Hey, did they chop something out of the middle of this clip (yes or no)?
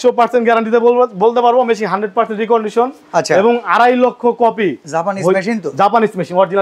no